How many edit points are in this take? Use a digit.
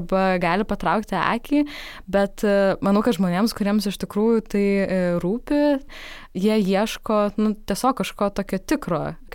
2